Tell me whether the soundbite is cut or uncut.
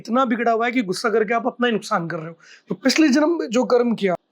uncut